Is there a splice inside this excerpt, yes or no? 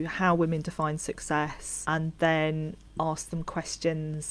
yes